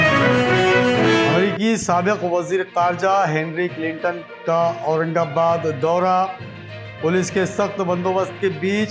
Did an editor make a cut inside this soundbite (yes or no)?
no